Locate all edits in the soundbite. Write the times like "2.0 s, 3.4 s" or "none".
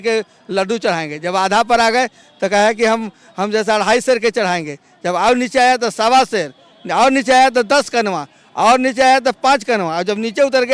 none

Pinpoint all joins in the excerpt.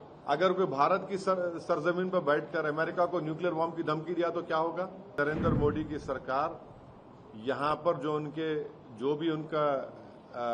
5.2 s

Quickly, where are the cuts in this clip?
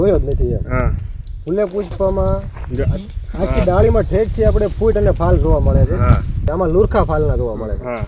6.4 s

